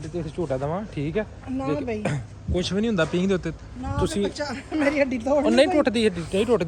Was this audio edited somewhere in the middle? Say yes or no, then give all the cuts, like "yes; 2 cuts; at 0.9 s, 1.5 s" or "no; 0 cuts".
no; 0 cuts